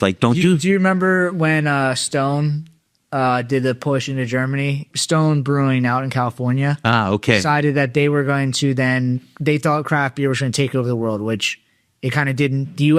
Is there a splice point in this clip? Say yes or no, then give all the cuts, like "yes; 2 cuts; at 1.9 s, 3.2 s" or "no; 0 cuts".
yes; 1 cut; at 4.9 s